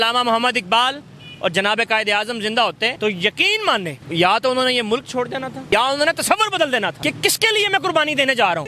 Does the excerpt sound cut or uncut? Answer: cut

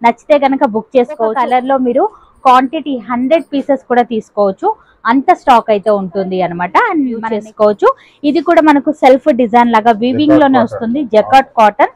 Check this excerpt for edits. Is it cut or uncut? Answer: cut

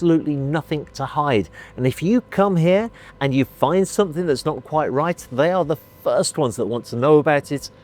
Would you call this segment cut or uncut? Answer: uncut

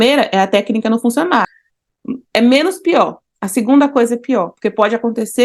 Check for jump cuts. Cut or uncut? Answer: cut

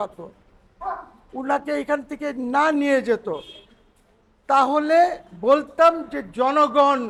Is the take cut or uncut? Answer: uncut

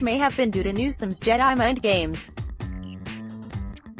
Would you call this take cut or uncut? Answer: cut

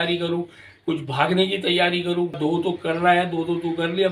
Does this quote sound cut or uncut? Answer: cut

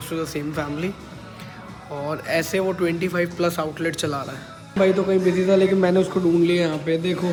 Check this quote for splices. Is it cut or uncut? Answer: uncut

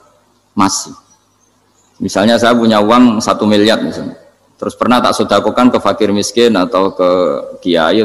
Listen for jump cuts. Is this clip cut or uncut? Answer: uncut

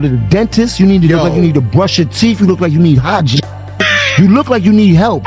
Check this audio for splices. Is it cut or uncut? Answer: uncut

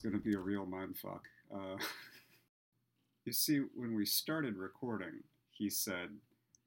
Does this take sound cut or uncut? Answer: cut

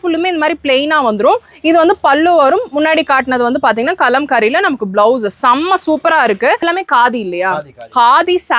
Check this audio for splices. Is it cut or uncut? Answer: cut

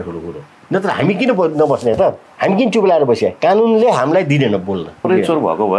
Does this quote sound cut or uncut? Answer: cut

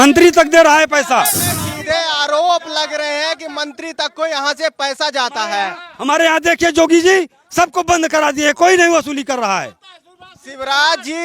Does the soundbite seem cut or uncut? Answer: cut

